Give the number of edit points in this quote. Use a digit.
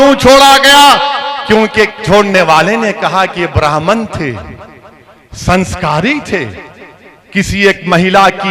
0